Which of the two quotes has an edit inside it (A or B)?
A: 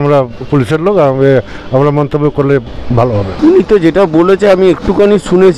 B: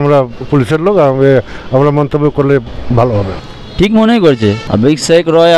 B